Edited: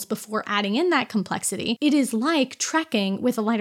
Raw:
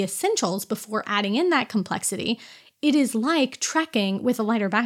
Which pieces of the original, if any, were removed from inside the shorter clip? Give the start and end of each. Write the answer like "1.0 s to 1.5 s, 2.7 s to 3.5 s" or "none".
2.4 s to 2.8 s